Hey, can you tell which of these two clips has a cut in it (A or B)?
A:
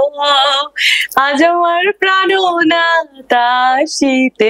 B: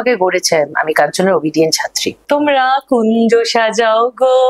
B